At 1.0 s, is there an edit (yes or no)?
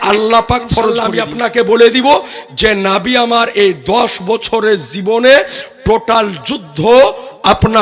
yes